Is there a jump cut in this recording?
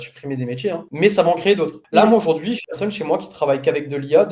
no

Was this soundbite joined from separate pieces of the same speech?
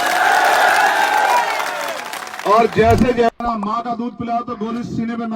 yes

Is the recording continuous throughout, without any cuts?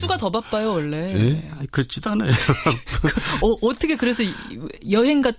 no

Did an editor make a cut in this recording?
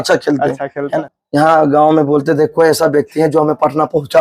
yes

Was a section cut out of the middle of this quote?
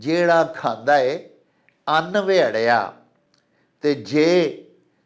no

